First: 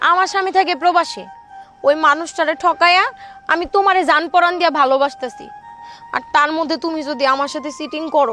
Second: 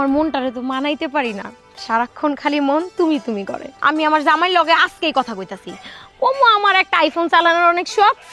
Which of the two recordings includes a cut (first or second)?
second